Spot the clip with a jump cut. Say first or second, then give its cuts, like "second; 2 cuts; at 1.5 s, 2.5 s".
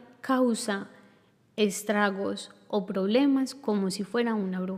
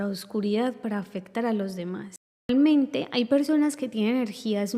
second; 1 cut; at 2.5 s